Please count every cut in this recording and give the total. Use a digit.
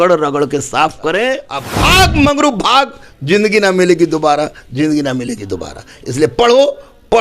1